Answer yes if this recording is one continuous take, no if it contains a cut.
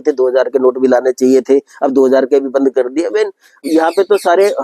no